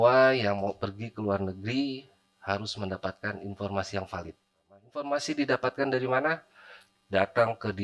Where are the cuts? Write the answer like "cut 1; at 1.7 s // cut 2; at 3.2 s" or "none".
cut 1; at 5.0 s